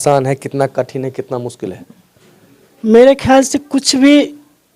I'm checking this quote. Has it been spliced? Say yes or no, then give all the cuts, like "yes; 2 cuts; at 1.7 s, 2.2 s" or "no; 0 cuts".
no; 0 cuts